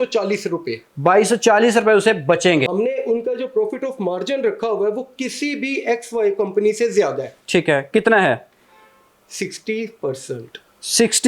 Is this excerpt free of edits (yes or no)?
no